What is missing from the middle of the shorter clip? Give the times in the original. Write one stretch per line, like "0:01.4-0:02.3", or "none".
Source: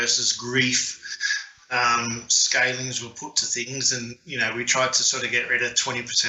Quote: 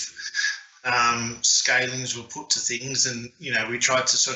none